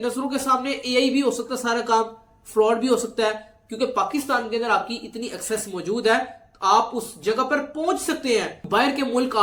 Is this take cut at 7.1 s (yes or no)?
no